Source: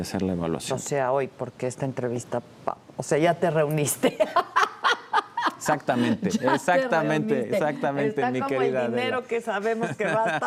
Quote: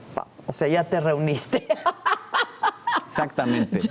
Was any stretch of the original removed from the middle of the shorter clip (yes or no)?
no